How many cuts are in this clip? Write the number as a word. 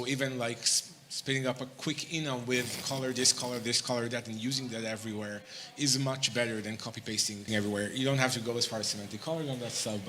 one